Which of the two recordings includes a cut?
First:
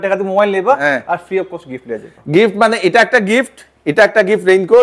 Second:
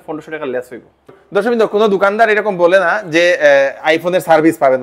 second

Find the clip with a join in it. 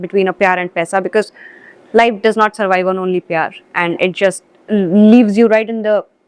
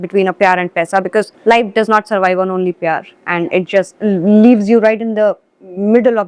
second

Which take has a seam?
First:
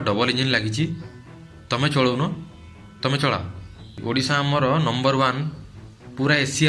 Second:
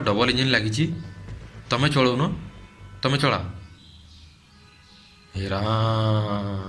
first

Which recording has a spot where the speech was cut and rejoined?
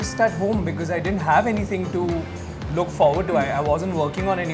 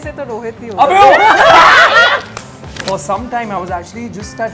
second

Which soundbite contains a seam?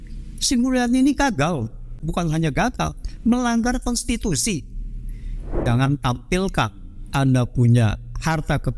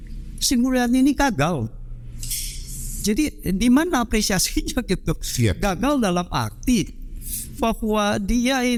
first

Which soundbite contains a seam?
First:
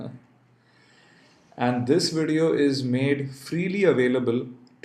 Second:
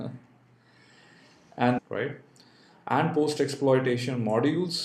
first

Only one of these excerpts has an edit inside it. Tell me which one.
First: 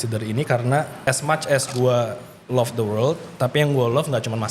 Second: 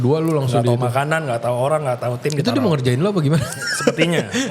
first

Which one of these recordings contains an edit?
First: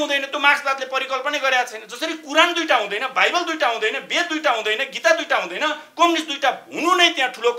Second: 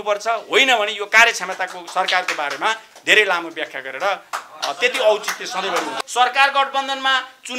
second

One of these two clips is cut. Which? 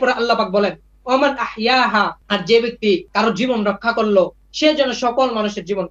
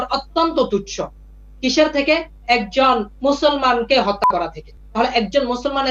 first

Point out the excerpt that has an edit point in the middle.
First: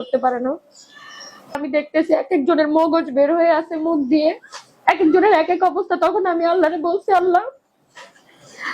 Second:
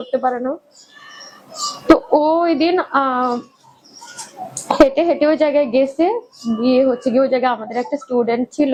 first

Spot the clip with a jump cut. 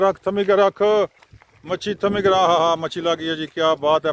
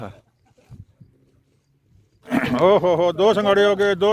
second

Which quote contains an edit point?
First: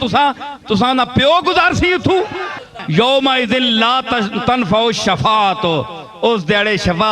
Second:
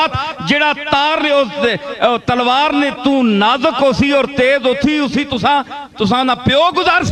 first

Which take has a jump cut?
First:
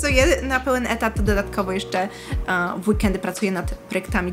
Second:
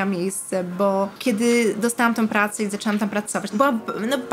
second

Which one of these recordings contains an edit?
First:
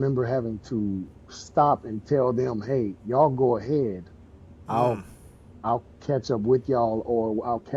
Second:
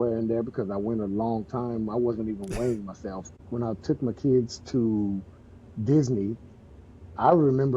second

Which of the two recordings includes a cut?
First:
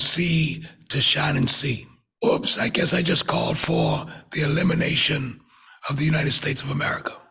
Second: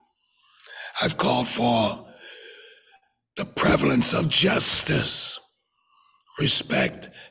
first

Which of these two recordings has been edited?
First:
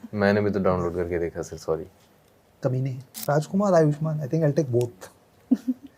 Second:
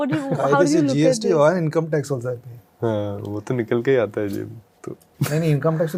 first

